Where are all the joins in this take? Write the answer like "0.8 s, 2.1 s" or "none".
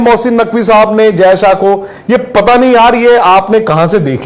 none